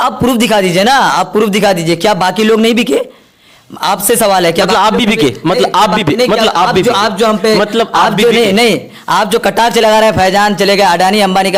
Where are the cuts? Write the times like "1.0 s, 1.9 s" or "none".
none

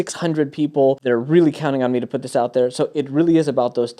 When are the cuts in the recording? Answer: 1.0 s

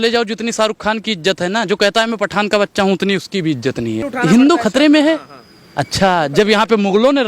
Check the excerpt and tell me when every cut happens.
4.1 s

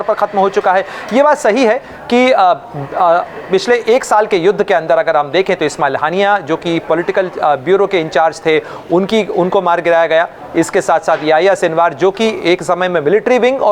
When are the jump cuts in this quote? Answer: none

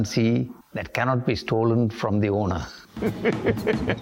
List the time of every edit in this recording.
2.8 s

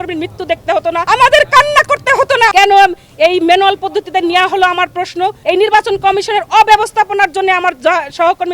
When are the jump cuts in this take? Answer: 2.5 s, 5.4 s

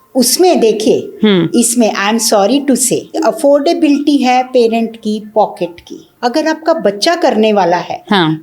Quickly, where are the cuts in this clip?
3.2 s, 6.1 s

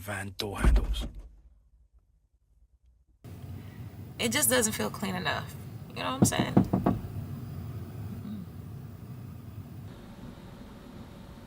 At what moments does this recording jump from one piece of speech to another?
3.3 s, 9.9 s

